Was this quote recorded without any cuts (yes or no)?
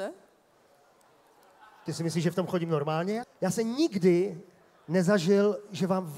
no